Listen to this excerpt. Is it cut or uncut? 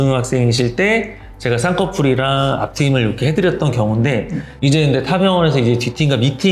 cut